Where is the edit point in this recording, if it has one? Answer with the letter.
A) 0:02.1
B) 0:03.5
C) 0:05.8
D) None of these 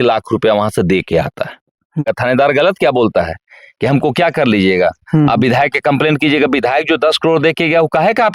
A